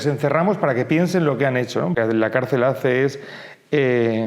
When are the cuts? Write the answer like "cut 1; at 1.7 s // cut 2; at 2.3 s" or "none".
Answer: cut 1; at 1.9 s